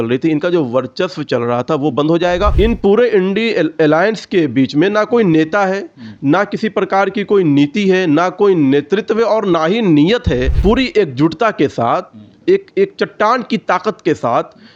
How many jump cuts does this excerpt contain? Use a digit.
2